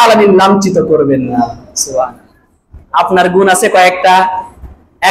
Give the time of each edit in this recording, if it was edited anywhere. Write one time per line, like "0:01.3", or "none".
none